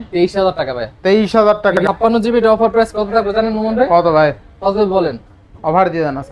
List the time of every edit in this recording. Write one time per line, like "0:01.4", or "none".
0:01.8